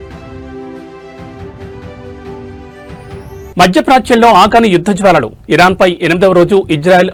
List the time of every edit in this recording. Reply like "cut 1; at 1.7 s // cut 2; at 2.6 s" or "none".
none